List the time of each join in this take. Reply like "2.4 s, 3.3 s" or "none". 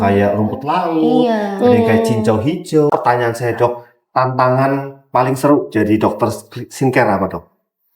2.9 s